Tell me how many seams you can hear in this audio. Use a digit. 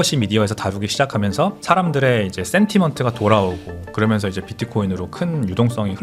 0